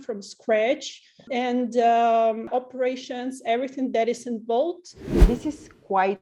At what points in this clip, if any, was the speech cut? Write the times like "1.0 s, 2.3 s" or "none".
1.3 s, 2.5 s, 5.1 s